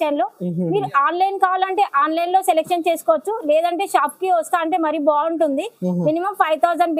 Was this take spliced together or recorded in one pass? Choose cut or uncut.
uncut